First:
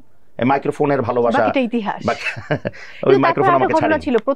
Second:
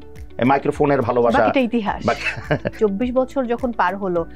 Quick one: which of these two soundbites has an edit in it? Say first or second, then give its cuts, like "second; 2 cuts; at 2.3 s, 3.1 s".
second; 1 cut; at 2.8 s